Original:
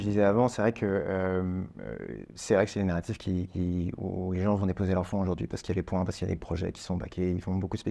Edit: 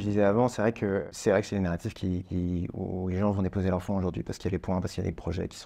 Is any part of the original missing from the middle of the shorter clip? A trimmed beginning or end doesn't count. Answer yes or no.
yes